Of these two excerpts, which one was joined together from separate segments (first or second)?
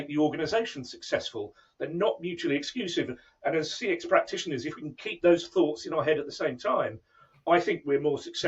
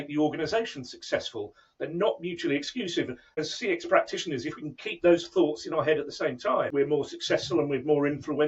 second